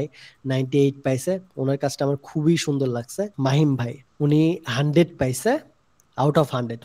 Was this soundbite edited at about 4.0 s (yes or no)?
yes